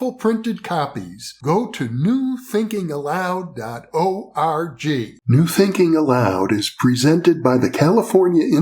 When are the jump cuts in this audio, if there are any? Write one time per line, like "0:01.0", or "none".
0:05.1